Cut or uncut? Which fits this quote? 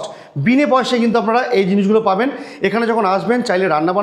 uncut